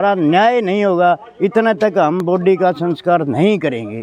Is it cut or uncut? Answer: uncut